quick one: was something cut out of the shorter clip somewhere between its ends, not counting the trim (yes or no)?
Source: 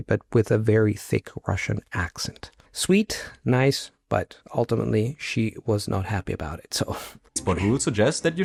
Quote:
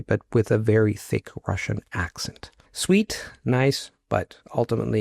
no